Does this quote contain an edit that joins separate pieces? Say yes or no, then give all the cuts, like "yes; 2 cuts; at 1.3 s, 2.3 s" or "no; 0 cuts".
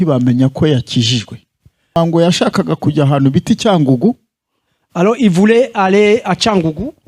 yes; 1 cut; at 2.0 s